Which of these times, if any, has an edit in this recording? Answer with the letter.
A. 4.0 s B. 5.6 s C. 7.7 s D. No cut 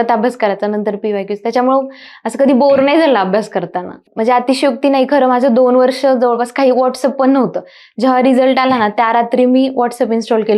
A